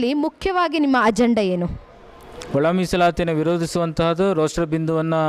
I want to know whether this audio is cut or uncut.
uncut